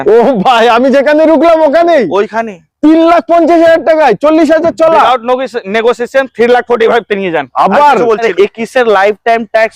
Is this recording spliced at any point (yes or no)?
yes